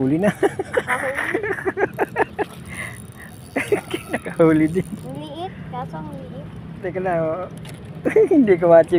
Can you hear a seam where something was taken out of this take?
no; 0 cuts

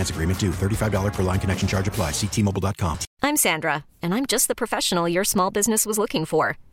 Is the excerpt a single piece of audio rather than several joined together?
no; 1 cut; at 3.0 s

